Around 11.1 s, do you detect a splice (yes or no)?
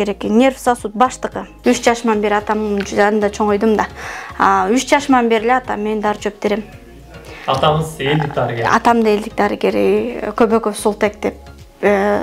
no